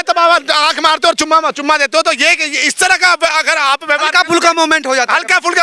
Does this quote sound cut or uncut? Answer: uncut